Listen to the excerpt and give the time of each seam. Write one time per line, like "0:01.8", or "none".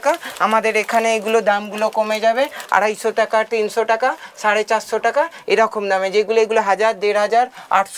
none